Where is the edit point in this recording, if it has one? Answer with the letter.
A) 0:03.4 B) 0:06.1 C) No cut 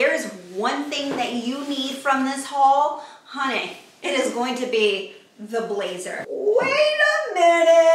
B